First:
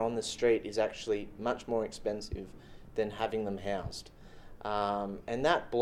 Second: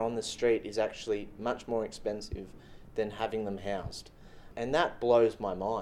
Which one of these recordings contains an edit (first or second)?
second